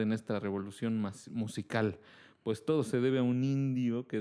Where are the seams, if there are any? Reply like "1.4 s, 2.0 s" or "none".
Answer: none